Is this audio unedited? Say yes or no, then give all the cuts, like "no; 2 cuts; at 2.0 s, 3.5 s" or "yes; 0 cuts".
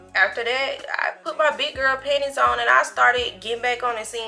yes; 0 cuts